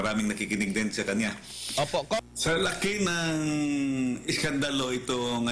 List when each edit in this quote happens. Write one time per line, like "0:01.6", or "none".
0:02.2